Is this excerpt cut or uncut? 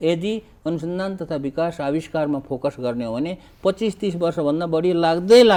uncut